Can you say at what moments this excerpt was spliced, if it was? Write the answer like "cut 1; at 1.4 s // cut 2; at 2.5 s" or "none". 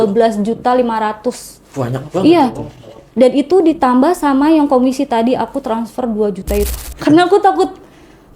cut 1; at 6.8 s